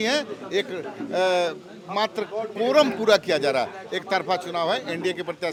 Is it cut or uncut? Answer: uncut